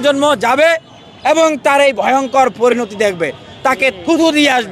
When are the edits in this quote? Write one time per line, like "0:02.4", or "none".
none